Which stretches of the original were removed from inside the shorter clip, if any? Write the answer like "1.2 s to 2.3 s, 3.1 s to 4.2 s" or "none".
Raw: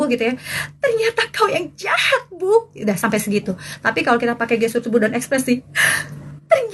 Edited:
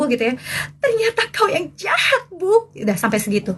none

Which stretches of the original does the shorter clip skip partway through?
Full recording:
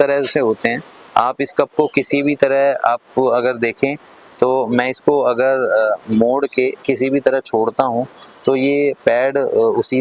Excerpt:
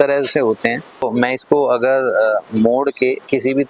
1.0 s to 4.6 s

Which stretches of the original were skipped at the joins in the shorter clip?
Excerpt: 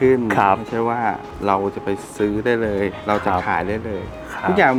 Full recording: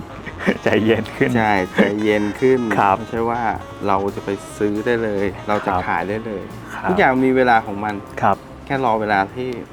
none

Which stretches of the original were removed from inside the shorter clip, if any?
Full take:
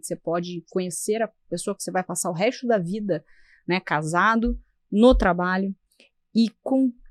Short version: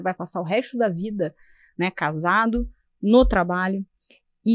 none

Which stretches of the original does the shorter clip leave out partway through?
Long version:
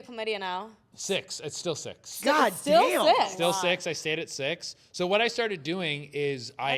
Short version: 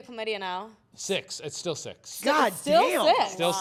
none

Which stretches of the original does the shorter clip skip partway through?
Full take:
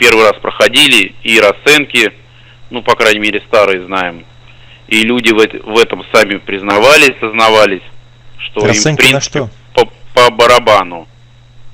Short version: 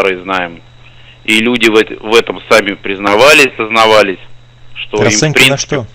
none

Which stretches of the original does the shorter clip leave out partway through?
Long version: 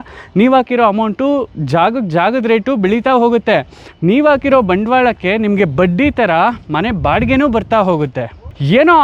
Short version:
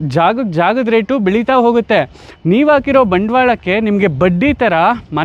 none

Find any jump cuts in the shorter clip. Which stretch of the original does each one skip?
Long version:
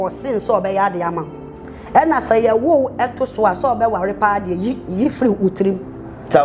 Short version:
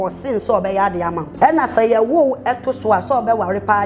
1.2 s to 1.8 s

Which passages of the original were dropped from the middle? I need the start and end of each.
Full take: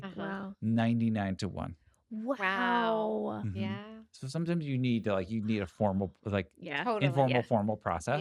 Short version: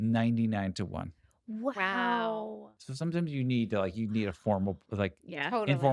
3.2 s to 3.9 s

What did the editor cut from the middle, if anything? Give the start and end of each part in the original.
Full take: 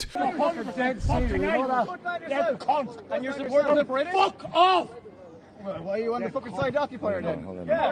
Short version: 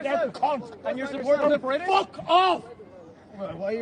none

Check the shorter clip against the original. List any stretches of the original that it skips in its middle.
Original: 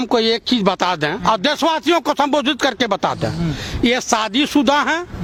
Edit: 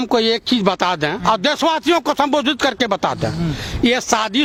none

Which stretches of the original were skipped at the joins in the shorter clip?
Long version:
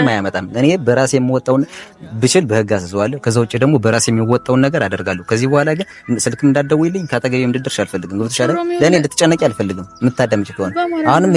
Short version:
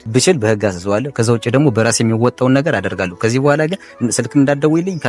none

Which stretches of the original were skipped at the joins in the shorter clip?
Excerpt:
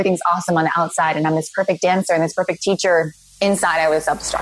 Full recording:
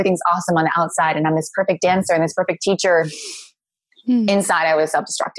3.4 s to 4.3 s

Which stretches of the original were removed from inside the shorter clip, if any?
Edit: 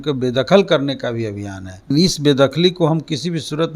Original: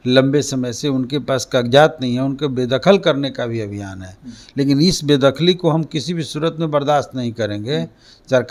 4.3 s to 4.8 s

